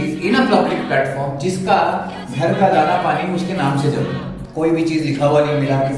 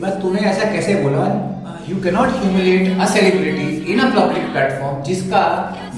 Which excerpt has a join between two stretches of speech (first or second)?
first